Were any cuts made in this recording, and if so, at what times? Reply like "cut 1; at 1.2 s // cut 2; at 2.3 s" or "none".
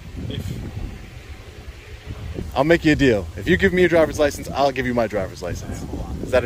cut 1; at 2.4 s